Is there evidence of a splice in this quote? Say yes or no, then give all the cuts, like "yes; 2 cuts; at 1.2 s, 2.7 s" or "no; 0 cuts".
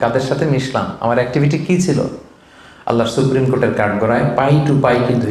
no; 0 cuts